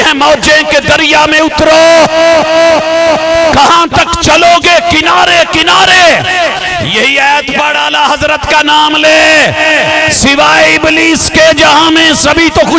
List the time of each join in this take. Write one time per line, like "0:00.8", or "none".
0:06.7